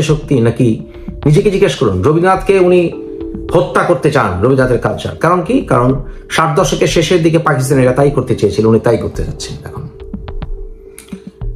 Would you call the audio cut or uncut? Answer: uncut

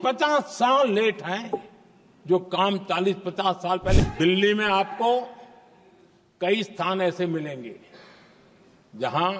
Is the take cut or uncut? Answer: cut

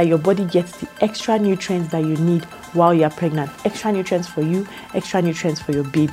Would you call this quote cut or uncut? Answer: uncut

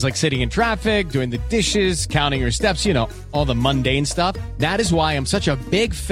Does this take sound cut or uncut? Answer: uncut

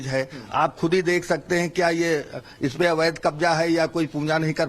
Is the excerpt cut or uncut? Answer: uncut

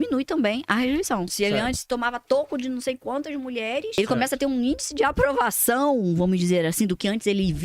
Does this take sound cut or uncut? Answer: cut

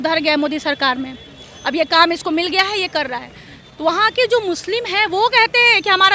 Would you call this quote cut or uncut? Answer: uncut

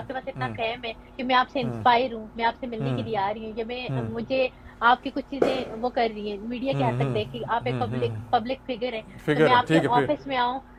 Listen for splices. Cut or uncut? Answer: uncut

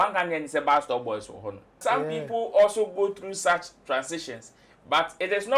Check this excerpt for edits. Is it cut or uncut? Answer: cut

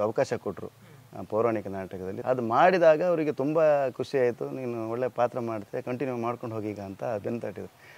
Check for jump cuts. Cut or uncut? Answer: cut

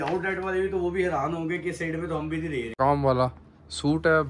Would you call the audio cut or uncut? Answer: cut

